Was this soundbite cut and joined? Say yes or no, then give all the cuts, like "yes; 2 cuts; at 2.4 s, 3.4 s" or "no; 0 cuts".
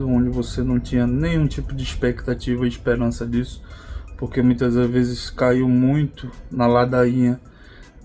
no; 0 cuts